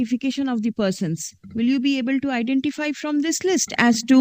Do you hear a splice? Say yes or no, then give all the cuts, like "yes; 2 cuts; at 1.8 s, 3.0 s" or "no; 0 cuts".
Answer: no; 0 cuts